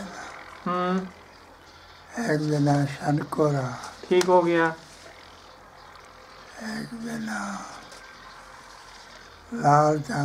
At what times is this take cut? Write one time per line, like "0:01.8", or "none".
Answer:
none